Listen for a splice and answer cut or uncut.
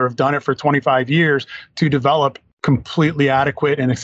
cut